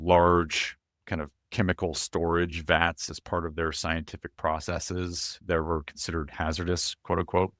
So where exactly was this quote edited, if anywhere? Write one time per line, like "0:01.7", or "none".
none